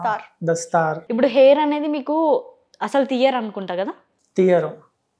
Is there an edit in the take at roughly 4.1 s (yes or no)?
no